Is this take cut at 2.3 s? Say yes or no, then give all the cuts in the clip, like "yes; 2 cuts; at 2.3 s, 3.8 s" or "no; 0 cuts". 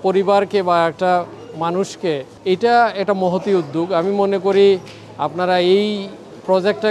yes; 1 cut; at 2.3 s